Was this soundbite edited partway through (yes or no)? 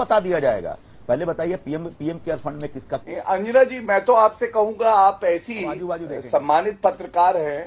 yes